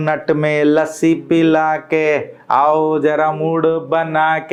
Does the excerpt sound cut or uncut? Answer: uncut